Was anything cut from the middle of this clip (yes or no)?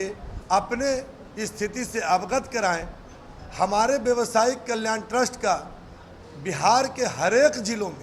no